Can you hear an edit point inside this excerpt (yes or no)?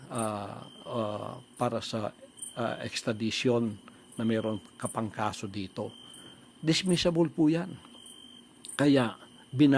yes